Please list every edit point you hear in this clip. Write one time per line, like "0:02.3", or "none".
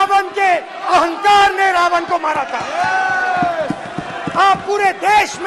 none